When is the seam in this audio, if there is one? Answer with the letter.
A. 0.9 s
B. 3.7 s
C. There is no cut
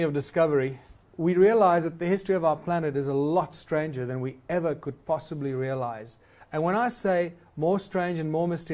B